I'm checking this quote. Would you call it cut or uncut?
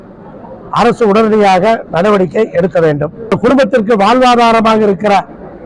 cut